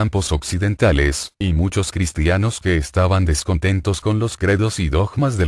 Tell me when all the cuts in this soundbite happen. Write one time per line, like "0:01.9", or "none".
0:04.4